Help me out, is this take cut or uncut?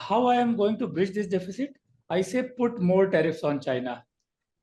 uncut